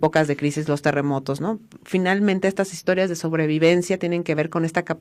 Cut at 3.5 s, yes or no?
no